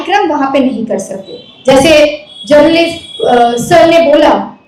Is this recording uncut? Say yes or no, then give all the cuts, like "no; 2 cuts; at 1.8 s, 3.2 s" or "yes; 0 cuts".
yes; 0 cuts